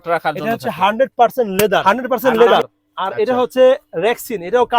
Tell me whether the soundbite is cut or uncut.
cut